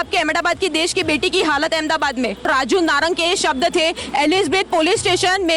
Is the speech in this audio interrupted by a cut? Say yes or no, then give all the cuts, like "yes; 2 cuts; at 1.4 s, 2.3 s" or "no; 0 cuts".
yes; 1 cut; at 2.5 s